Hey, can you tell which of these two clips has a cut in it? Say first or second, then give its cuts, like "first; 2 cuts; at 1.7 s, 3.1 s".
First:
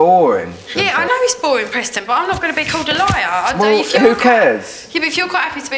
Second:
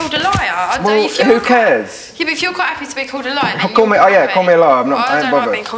first; 1 cut; at 1.1 s